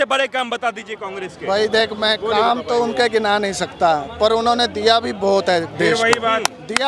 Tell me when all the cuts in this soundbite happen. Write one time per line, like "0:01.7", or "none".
none